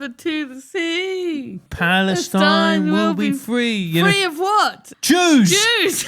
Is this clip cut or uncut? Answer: cut